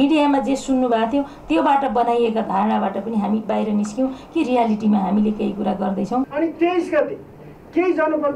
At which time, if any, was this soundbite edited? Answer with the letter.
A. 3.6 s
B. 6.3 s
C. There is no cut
B